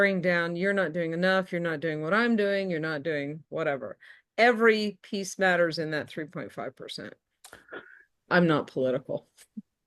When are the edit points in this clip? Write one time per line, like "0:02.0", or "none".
0:08.3